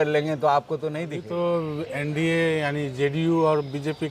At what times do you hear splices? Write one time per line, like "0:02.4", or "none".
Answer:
0:01.2